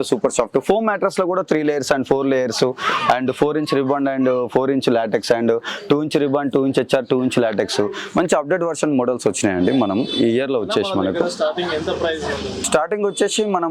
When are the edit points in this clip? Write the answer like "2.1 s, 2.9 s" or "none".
none